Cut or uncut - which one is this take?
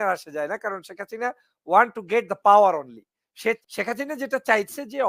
cut